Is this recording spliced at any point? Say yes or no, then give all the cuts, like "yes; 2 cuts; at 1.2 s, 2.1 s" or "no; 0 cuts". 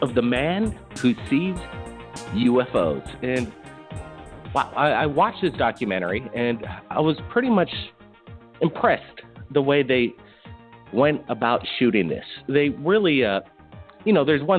no; 0 cuts